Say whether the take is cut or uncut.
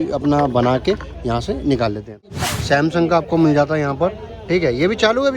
cut